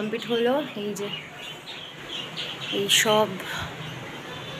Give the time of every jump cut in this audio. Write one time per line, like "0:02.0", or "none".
none